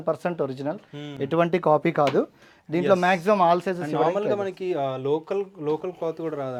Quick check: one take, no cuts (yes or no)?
yes